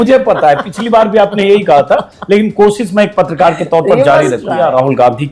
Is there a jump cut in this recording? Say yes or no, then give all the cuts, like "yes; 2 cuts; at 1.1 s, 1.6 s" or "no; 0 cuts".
yes; 1 cut; at 4.1 s